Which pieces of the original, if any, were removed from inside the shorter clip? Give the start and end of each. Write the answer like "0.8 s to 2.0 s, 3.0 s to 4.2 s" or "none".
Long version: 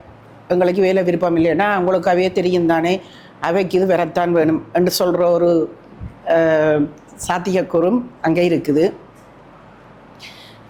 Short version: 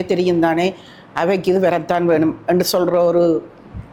none